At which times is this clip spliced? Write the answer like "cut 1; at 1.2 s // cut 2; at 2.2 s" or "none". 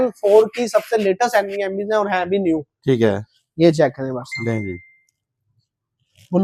none